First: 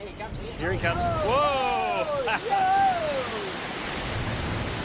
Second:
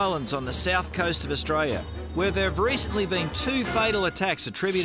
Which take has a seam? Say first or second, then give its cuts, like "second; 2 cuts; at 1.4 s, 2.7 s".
second; 1 cut; at 3.1 s